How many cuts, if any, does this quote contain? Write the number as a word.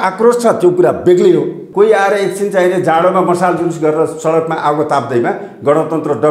one